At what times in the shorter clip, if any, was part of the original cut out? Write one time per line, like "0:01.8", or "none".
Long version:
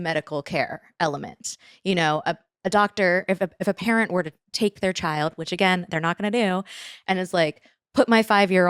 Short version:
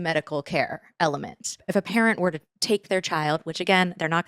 0:01.6